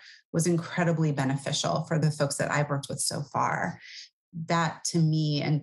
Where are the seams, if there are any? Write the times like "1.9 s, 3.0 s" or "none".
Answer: 2.0 s